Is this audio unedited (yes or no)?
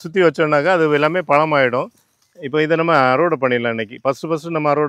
yes